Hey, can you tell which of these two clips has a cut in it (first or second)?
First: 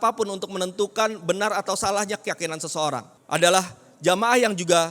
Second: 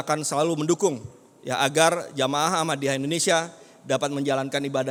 first